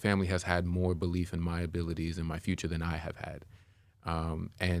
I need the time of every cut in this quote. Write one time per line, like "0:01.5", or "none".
none